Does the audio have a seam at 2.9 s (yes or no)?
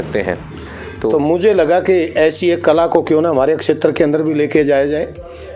no